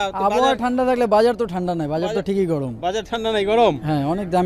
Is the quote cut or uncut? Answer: uncut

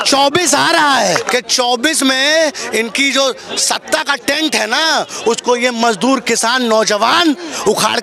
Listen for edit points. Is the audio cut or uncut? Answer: cut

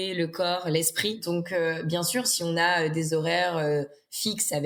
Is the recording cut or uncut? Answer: uncut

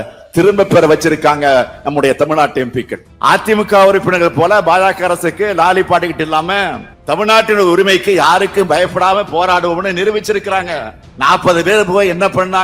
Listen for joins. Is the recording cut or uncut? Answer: cut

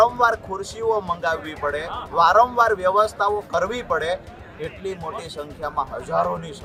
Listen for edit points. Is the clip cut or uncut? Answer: uncut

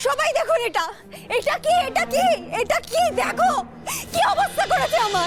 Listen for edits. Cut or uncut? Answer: uncut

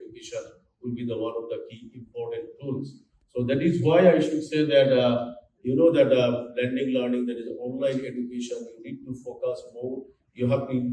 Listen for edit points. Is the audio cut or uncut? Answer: uncut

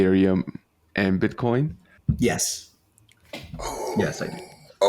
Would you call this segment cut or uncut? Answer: cut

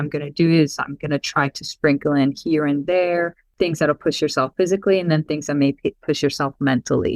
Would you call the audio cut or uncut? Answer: cut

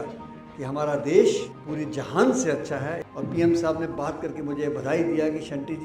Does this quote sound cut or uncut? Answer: cut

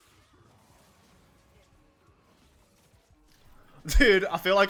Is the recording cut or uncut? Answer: uncut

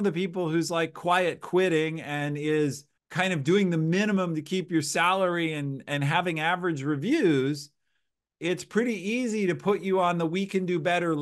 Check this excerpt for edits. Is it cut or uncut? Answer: uncut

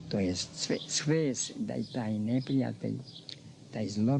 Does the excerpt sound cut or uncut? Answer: uncut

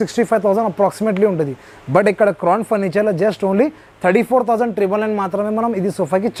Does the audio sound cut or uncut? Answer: uncut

